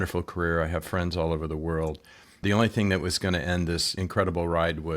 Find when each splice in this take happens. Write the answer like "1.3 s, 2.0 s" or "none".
2.4 s, 4.0 s